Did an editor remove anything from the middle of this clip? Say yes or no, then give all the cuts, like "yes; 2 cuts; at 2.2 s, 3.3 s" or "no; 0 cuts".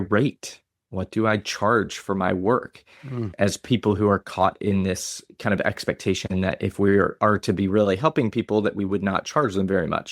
yes; 1 cut; at 3.3 s